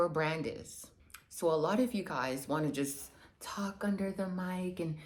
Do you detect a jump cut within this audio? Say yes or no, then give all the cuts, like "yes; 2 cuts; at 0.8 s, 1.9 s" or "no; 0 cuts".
no; 0 cuts